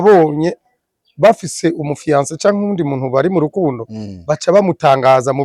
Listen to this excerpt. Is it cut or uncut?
uncut